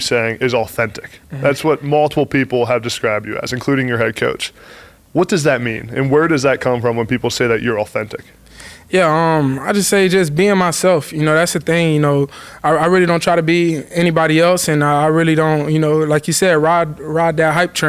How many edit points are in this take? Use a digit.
0